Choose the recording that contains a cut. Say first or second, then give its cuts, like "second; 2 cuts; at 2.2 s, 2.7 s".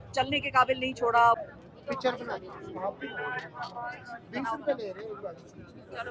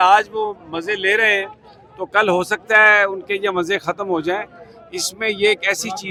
first; 1 cut; at 1.4 s